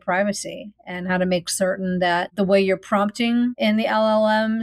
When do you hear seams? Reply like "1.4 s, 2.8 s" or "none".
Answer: 2.3 s, 3.6 s